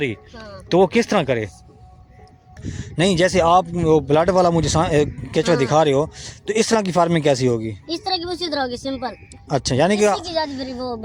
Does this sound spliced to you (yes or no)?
yes